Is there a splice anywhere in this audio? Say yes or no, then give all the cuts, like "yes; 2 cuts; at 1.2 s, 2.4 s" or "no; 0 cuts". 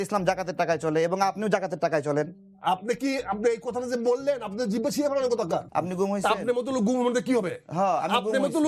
yes; 2 cuts; at 2.4 s, 5.7 s